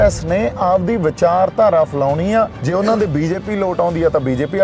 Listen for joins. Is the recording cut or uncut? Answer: cut